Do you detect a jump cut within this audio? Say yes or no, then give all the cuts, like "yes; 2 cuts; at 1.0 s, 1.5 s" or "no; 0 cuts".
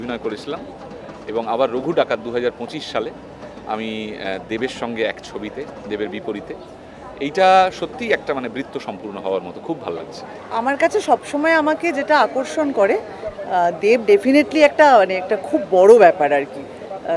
yes; 1 cut; at 10.3 s